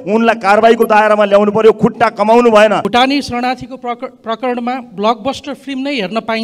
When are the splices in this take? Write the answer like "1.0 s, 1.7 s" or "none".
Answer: 2.8 s